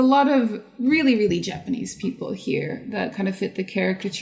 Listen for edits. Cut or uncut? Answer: uncut